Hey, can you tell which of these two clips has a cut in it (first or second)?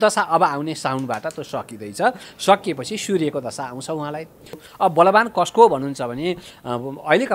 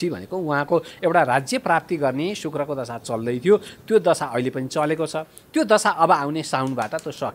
first